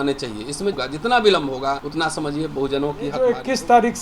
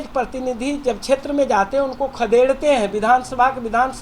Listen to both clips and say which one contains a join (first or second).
first